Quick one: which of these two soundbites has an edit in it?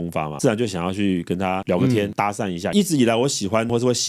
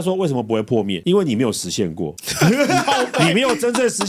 first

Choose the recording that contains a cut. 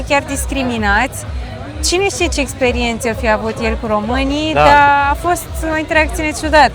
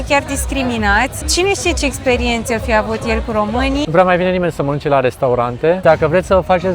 second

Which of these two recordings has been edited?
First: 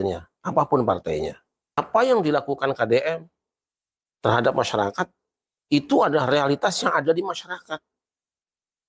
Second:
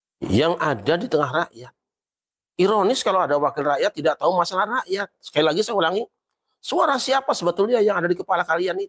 first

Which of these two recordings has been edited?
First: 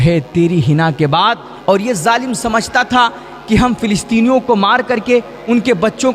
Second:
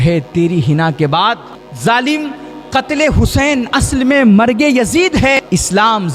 second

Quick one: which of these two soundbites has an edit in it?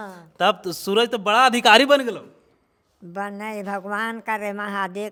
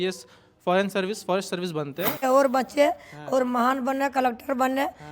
second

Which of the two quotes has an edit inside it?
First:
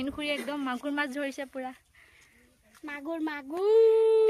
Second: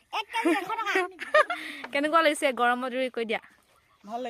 second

